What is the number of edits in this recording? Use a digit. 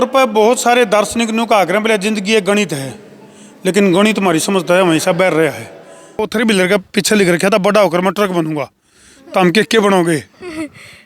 1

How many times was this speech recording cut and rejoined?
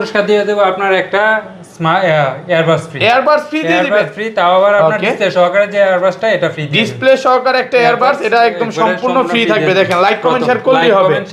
0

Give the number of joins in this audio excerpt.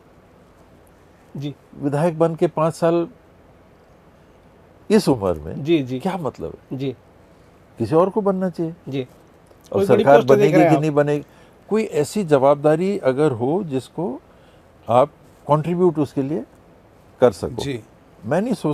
0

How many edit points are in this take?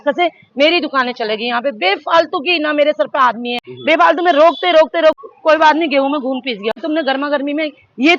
3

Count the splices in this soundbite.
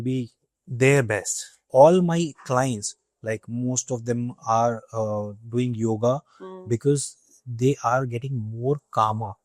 1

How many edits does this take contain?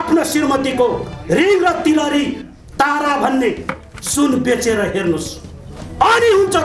0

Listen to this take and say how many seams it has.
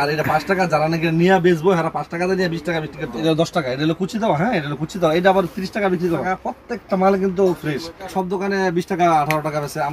3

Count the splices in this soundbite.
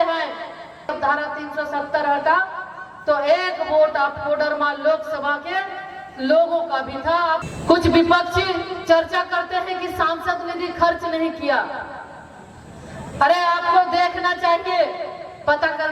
2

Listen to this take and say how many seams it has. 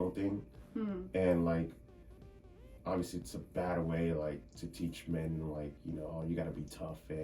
0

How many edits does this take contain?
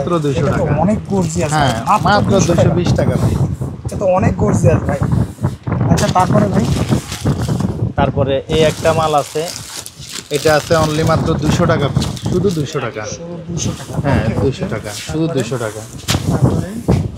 0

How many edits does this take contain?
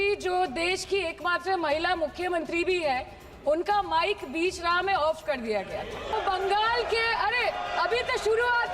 1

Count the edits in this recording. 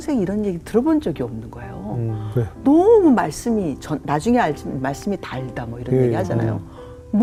0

